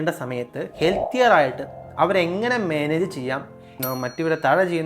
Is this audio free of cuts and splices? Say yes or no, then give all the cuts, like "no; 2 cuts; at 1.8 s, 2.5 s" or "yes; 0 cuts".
no; 1 cut; at 3.8 s